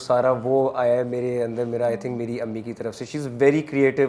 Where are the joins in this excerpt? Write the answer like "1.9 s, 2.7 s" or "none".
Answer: none